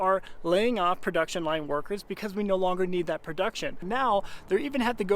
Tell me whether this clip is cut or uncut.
cut